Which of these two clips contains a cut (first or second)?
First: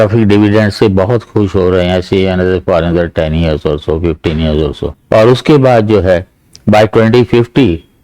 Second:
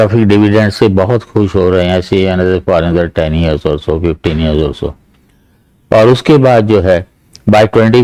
first